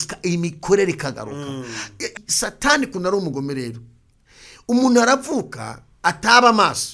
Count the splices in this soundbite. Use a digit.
1